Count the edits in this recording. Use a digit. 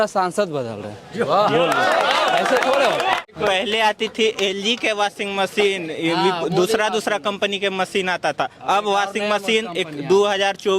1